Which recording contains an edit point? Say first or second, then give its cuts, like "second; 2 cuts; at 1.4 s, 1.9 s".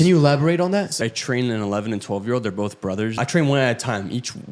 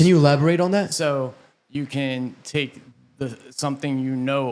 first; 2 cuts; at 1.0 s, 3.2 s